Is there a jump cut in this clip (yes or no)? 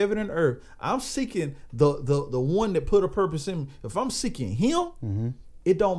no